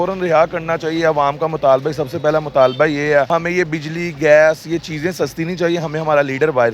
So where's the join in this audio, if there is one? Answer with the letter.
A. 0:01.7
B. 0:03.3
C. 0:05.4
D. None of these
B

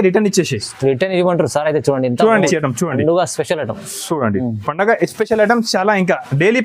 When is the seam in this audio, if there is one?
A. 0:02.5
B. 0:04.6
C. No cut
A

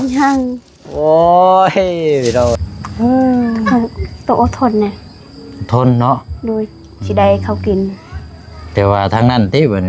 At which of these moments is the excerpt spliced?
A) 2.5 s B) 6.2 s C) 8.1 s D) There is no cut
A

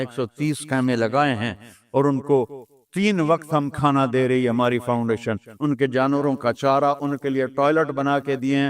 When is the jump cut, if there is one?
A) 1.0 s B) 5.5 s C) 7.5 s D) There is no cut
B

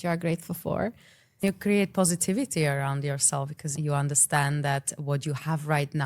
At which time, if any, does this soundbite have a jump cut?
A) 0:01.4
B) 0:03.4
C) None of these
A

